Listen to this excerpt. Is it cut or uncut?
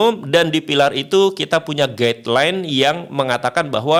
uncut